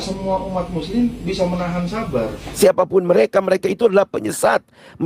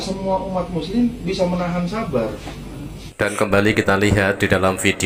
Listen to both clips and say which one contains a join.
first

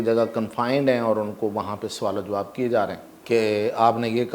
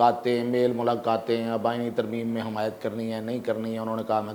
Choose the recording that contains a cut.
first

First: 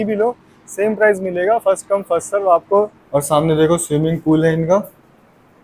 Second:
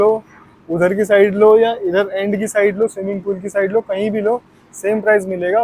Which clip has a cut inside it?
first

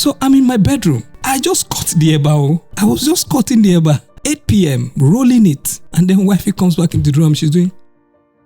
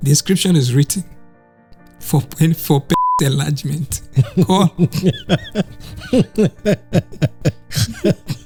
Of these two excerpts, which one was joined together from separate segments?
first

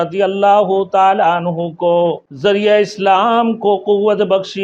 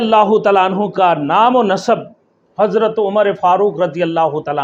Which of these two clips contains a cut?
first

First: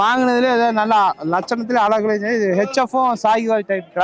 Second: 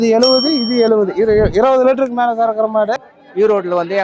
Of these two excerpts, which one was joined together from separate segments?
second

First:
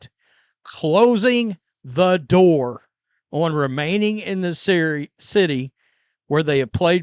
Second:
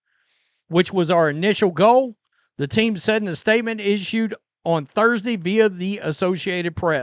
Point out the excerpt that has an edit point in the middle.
second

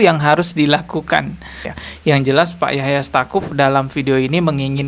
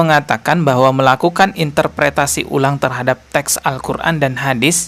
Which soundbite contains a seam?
first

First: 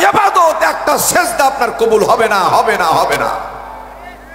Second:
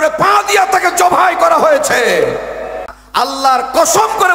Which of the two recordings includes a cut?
second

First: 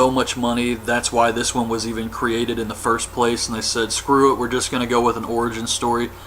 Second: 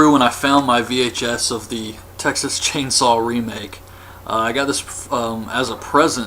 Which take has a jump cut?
first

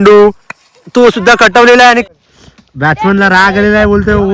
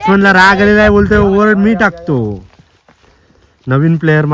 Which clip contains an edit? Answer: first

